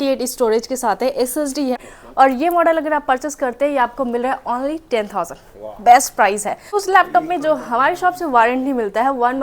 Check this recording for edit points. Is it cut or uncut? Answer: cut